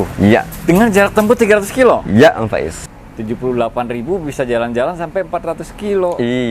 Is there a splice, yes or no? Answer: yes